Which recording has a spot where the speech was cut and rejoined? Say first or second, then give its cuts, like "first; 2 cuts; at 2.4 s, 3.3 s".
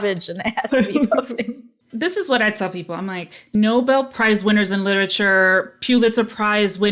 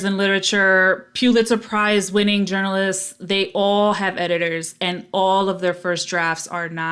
first; 2 cuts; at 1.9 s, 3.5 s